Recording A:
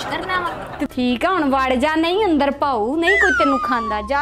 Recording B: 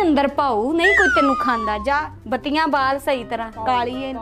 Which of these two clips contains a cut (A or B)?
A